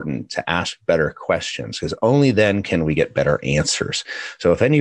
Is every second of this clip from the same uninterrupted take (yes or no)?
yes